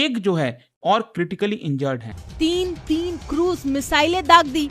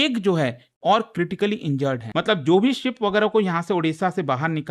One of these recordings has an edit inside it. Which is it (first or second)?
first